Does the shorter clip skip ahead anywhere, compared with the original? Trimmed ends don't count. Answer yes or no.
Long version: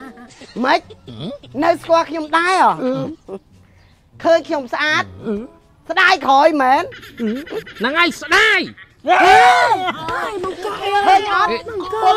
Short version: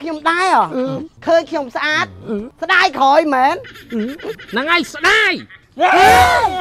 yes